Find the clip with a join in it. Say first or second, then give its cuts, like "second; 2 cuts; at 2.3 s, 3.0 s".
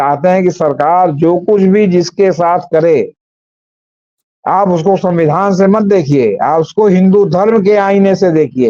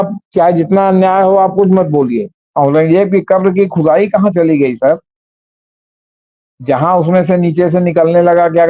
second; 1 cut; at 2.4 s